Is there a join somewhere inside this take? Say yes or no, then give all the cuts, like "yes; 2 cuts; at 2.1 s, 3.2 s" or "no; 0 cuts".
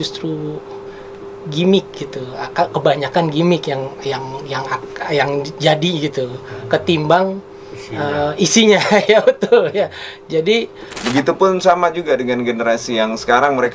yes; 1 cut; at 10.9 s